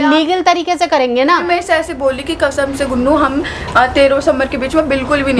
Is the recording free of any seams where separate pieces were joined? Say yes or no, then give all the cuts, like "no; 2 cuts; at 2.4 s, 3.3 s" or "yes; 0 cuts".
no; 1 cut; at 1.4 s